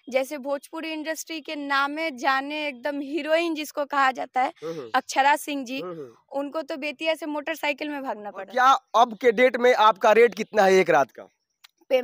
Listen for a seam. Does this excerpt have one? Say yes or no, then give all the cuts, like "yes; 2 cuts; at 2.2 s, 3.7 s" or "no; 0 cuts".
yes; 1 cut; at 8.5 s